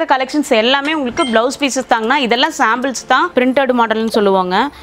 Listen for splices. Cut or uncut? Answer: cut